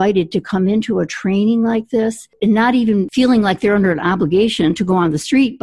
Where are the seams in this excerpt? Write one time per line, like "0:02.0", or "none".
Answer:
0:02.3
0:03.1